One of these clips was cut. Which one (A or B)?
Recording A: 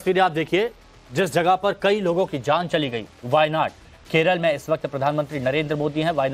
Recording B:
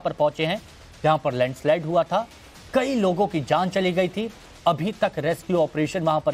B